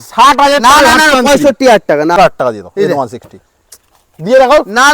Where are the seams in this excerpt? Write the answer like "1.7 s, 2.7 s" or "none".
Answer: 2.2 s